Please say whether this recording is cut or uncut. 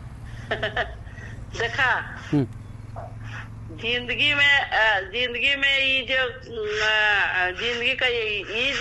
uncut